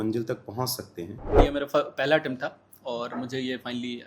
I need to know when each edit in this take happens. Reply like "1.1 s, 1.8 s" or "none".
1.4 s